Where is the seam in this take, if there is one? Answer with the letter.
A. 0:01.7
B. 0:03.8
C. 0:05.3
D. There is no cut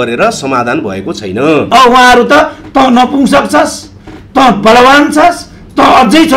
A